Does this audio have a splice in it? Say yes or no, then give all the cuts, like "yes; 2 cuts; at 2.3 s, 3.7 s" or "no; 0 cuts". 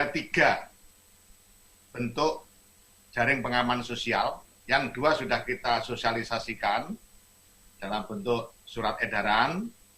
yes; 1 cut; at 4.0 s